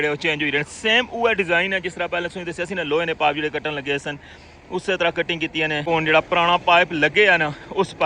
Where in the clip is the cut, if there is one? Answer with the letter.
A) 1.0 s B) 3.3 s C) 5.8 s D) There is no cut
C